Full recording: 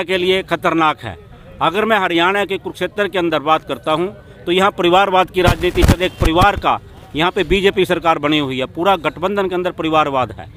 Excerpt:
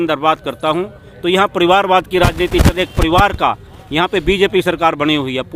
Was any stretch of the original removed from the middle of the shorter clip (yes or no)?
no